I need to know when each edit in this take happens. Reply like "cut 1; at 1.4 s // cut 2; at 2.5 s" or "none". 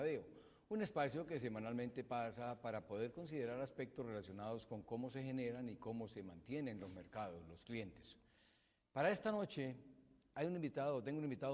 cut 1; at 8.6 s